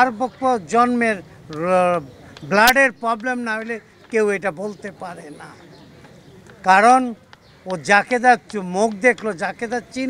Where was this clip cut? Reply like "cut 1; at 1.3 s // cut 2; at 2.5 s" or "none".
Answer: none